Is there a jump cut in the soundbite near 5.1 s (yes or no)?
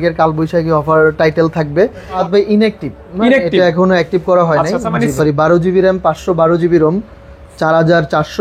yes